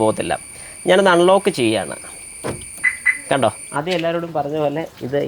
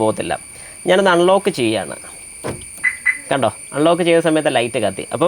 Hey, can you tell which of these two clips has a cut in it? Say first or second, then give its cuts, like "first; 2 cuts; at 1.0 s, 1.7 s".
first; 1 cut; at 3.7 s